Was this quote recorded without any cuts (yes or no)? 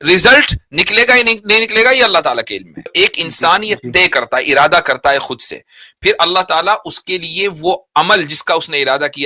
no